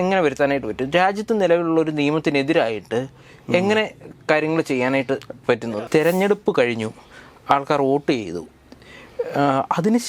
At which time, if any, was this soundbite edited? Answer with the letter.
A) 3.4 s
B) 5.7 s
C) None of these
B